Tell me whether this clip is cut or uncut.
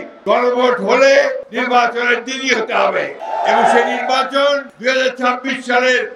cut